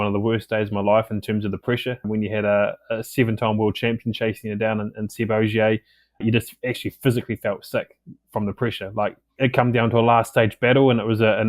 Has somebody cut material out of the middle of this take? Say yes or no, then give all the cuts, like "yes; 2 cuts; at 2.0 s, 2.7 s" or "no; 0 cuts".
yes; 1 cut; at 9.4 s